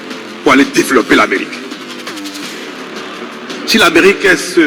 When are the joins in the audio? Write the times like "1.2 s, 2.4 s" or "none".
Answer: 1.7 s, 3.2 s